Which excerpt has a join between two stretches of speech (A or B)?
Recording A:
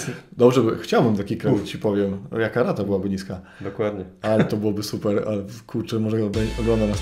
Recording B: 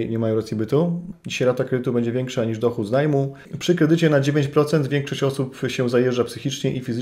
B